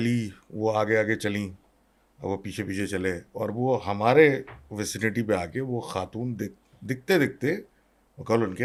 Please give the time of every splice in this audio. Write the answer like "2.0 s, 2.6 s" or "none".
none